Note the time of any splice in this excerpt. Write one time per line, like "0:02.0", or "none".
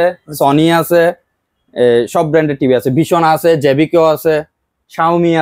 none